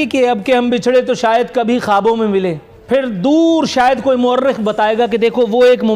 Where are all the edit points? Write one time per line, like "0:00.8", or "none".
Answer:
0:02.7